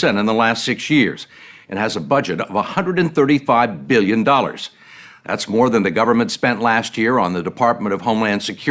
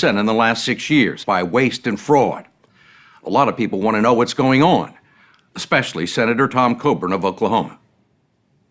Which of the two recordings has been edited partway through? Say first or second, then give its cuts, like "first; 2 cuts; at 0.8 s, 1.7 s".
first; 1 cut; at 1.2 s